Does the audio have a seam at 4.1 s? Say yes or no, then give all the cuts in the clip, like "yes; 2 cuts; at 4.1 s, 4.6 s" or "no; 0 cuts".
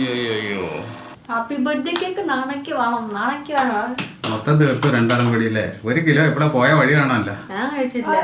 no; 1 cut; at 1.0 s